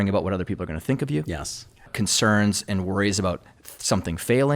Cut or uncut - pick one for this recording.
cut